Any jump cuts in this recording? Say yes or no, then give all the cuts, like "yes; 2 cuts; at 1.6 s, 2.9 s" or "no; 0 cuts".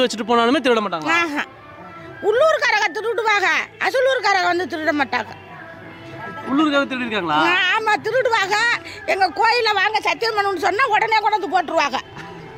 no; 0 cuts